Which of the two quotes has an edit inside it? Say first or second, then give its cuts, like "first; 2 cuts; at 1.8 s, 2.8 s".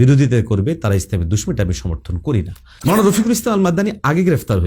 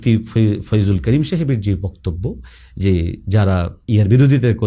first; 1 cut; at 2.6 s